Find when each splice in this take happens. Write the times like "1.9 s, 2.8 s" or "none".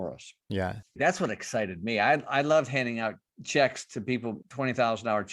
0.9 s, 3.3 s, 4.4 s